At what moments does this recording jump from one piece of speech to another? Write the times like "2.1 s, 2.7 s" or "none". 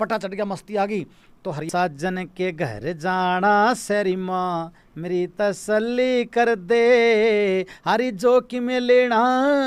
1.7 s